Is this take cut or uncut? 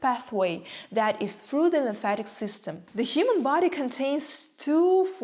cut